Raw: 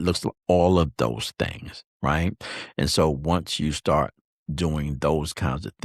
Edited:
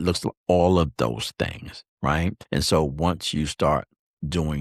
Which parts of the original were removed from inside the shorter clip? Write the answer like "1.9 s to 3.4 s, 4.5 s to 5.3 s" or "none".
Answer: 2.4 s to 2.7 s